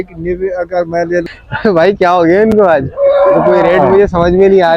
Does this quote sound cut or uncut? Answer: cut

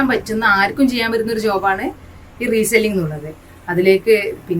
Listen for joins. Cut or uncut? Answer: uncut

